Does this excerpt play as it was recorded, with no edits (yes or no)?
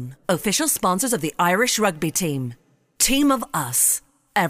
yes